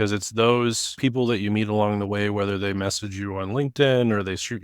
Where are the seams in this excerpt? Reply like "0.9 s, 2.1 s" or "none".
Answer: 0.9 s